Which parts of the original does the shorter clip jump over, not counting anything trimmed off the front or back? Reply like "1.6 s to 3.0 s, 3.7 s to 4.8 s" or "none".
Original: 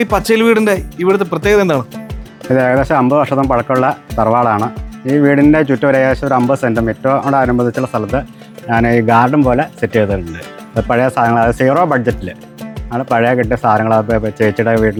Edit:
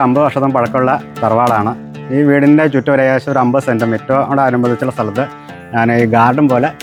none